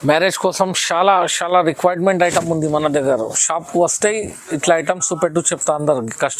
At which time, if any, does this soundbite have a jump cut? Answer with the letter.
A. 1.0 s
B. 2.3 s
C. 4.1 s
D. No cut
D